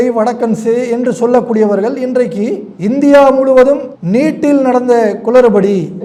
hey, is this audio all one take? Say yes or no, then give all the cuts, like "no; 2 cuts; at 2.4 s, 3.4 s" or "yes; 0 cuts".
yes; 0 cuts